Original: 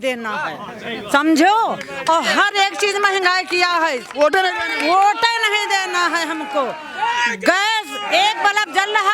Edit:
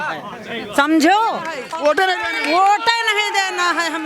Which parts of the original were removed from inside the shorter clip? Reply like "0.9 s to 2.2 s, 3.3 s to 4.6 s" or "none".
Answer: 1.9 s to 3.9 s